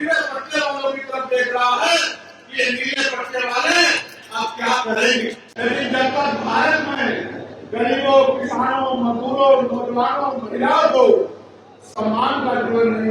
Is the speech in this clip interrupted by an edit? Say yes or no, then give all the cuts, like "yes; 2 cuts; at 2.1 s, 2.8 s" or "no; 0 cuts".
yes; 1 cut; at 5.4 s